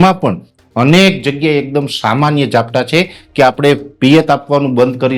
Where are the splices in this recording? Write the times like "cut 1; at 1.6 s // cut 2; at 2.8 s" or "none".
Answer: none